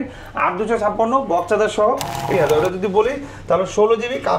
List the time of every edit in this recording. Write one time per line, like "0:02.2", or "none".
0:02.3